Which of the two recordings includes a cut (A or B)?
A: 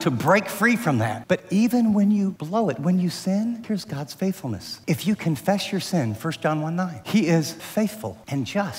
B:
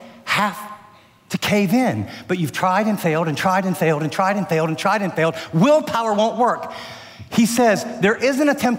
A